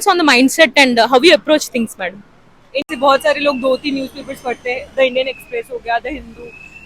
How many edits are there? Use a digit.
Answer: 1